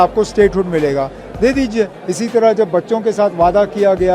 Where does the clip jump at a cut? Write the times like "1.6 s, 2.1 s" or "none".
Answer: 2.0 s